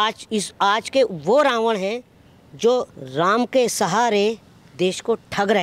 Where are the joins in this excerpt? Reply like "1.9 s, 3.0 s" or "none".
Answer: 3.0 s